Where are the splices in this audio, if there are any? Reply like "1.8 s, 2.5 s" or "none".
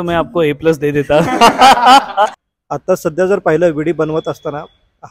2.4 s